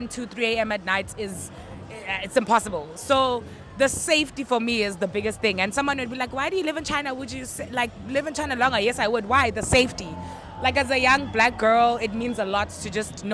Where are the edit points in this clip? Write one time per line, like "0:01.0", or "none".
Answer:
none